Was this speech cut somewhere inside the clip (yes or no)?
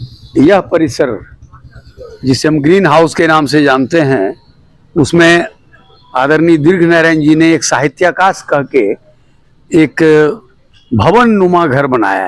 no